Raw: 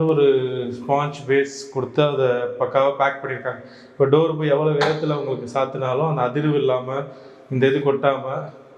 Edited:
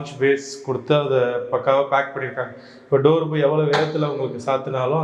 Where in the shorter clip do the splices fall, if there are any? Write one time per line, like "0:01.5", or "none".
none